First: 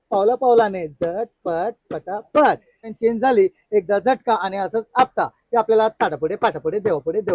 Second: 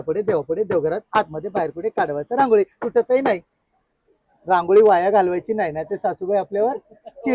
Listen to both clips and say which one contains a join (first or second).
first